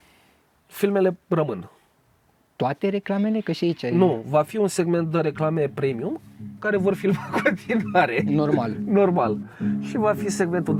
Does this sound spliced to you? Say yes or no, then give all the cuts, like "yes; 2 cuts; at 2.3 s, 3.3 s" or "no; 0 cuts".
no; 0 cuts